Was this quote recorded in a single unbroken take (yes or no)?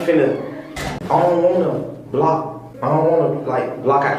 no